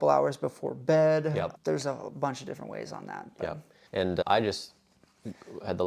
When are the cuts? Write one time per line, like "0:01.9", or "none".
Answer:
0:03.8